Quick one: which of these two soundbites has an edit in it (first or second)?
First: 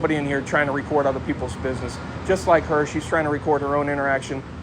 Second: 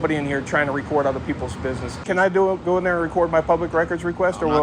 second